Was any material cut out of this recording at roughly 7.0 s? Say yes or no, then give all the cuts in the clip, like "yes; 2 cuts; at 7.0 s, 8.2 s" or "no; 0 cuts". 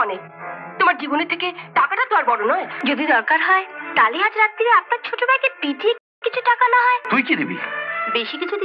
yes; 2 cuts; at 2.7 s, 7.0 s